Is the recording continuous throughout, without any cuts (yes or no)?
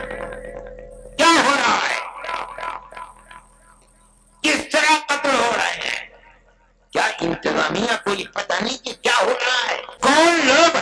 no